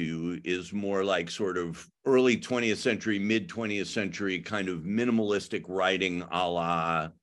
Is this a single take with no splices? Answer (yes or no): no